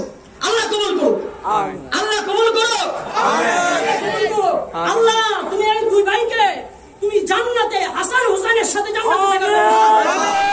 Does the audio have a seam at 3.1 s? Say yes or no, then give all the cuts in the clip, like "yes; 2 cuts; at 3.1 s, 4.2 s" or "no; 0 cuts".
yes; 1 cut; at 3.1 s